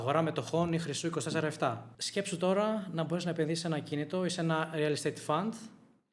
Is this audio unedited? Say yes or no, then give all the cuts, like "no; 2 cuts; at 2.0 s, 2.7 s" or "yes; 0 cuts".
no; 1 cut; at 1.9 s